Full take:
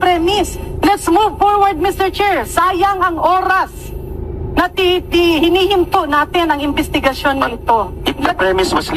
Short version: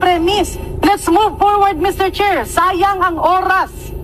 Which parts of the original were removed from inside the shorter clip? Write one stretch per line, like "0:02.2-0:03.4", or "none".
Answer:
none